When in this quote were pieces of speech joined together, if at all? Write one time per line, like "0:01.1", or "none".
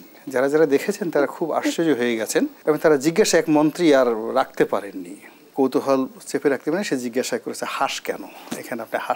0:02.6
0:05.5